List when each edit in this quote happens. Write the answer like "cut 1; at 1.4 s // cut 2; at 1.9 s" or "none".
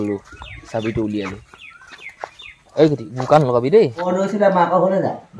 cut 1; at 4.1 s